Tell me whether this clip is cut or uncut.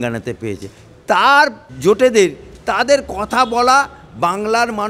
cut